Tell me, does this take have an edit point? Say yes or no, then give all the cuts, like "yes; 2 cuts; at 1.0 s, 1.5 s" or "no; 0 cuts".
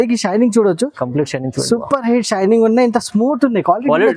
no; 0 cuts